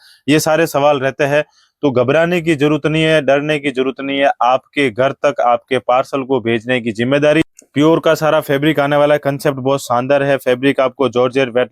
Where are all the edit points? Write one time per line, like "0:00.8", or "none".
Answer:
0:07.4